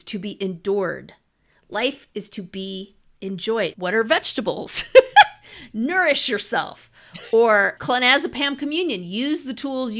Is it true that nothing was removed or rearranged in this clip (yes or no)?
no